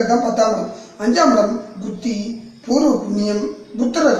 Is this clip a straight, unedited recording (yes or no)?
yes